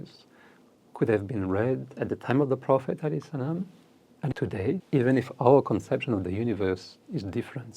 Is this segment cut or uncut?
cut